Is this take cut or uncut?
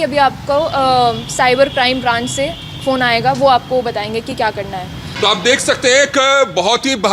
cut